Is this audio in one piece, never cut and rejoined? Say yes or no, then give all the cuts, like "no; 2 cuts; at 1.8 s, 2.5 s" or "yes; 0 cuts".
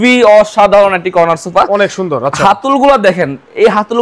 yes; 0 cuts